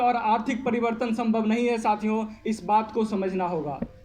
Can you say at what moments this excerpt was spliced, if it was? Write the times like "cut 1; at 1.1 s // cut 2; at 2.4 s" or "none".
none